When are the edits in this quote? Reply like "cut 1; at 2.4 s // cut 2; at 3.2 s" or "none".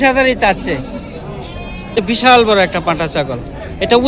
cut 1; at 2.0 s